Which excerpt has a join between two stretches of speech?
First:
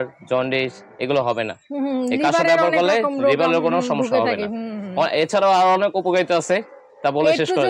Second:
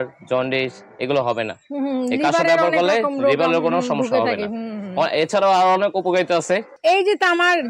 second; 1 cut; at 6.7 s

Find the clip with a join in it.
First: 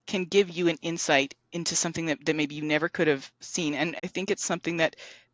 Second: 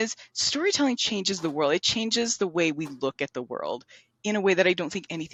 first; 1 cut; at 4.0 s

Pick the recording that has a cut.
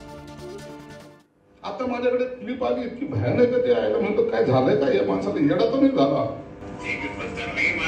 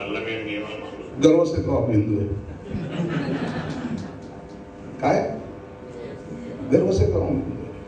first; 1 cut; at 1.1 s

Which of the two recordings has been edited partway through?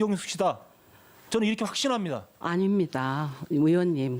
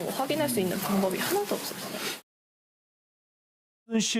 second; 1 cut; at 1.0 s

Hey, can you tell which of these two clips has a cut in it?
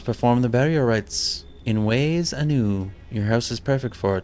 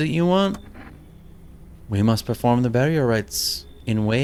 first; 1 cut; at 3.0 s

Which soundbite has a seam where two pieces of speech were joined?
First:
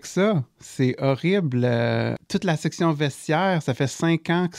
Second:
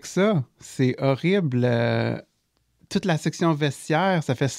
first; 1 cut; at 2.2 s

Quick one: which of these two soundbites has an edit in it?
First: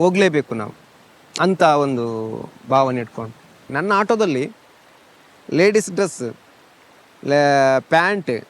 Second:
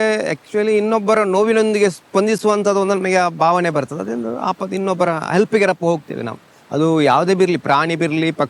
first; 1 cut; at 3.7 s

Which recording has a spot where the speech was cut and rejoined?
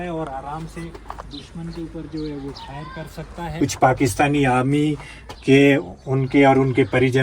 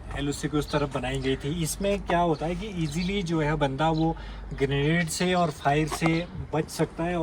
first; 1 cut; at 3.4 s

